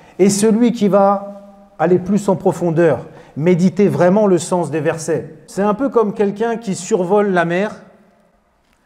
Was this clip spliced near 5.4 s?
yes; 1 cut; at 5.4 s

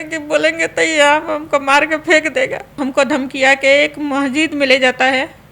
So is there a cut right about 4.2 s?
no; 1 cut; at 2.8 s

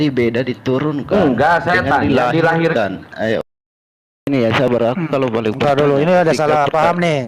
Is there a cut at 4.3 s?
yes; 1 cut; at 4.3 s

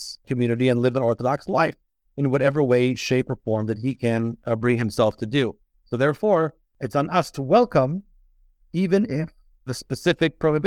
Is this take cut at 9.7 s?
yes; 1 cut; at 9.7 s

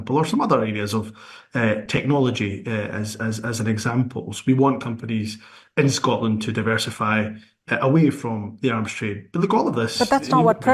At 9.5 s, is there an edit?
yes; 1 cut; at 9.5 s

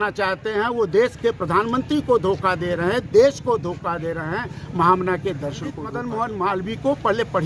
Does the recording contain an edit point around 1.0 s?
no; 1 cut; at 5.9 s

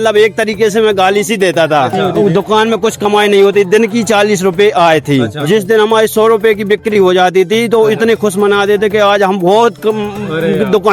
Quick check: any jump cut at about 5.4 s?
yes; 2 cuts; at 2.0 s, 5.4 s

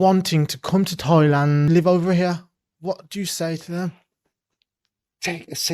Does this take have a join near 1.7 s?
yes; 1 cut; at 1.7 s

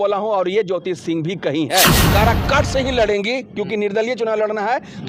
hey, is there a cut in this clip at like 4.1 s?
no; 1 cut; at 2.0 s

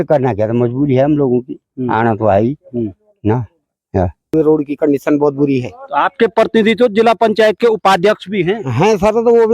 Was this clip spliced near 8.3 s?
no; 1 cut; at 4.3 s

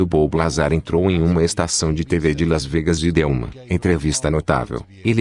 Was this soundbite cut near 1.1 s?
no; 1 cut; at 3.5 s

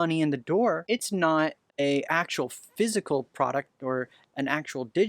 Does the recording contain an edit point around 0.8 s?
yes; 2 cuts; at 0.8 s, 1.6 s

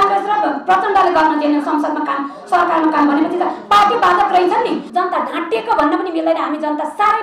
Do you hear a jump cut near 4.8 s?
yes; 1 cut; at 4.8 s

